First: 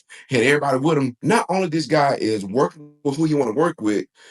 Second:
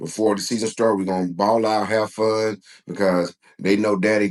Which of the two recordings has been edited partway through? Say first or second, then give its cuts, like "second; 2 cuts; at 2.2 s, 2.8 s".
first; 1 cut; at 1.2 s